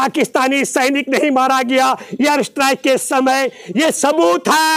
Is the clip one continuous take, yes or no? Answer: yes